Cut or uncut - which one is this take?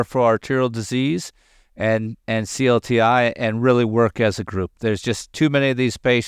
uncut